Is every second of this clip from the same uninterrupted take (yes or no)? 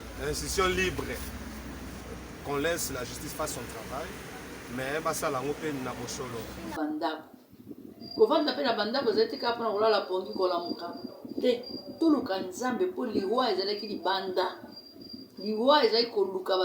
no